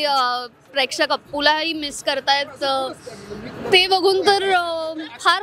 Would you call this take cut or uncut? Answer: uncut